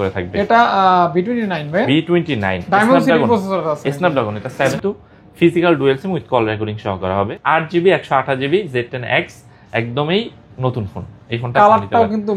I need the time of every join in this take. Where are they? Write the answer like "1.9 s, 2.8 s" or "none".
4.7 s, 7.4 s